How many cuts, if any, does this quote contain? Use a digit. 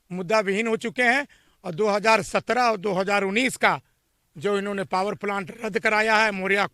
0